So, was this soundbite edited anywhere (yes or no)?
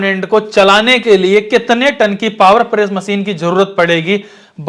no